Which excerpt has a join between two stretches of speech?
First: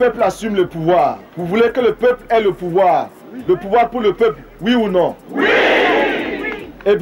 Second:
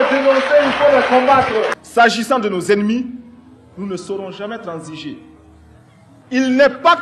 second; 1 cut; at 1.8 s

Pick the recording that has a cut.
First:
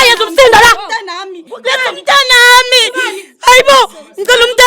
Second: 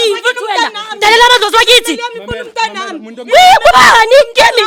first; 1 cut; at 1.4 s

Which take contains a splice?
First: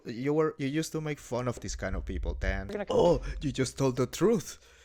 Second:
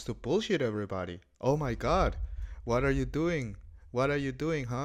first; 1 cut; at 2.7 s

